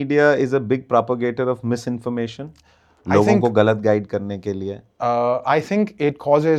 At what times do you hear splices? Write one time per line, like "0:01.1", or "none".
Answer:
none